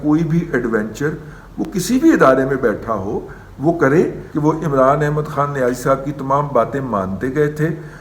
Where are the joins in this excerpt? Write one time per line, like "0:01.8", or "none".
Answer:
0:04.2